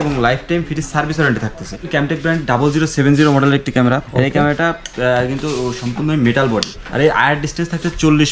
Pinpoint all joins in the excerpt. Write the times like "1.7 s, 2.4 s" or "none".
1.9 s, 4.1 s, 6.8 s